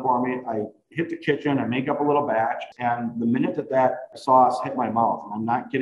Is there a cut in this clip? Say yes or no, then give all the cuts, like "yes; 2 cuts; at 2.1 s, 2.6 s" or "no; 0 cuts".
yes; 2 cuts; at 2.7 s, 4.1 s